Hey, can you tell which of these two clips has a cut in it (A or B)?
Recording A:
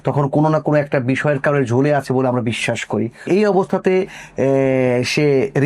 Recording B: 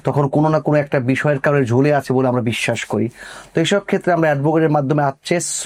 A